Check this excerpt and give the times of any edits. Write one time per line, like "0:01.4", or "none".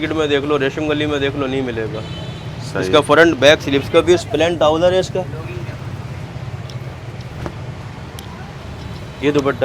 none